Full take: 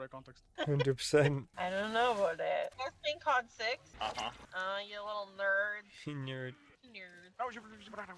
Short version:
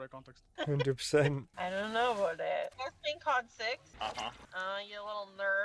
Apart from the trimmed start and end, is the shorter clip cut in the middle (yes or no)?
no